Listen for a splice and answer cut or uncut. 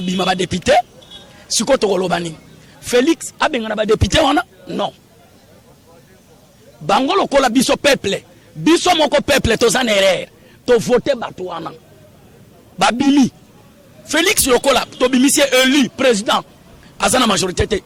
uncut